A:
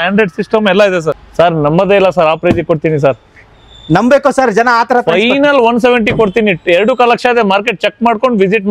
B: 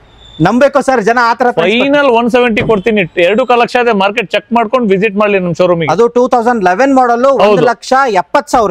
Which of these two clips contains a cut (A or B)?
A